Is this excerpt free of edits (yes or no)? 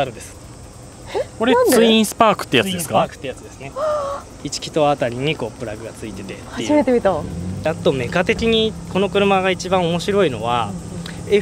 yes